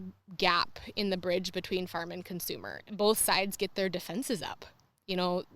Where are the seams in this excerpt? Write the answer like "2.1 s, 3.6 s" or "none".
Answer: 2.7 s